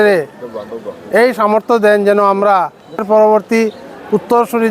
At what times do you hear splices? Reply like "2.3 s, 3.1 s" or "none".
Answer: 3.0 s

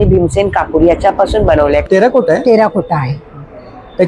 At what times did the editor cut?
1.8 s

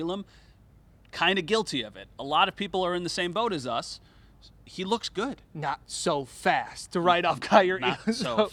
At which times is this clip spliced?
none

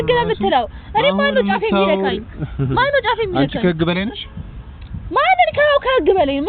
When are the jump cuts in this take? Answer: none

